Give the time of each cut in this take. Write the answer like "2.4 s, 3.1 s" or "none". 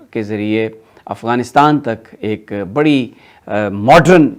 none